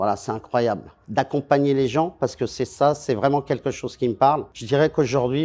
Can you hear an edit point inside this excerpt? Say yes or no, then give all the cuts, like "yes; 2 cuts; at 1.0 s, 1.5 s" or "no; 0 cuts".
yes; 2 cuts; at 0.9 s, 4.6 s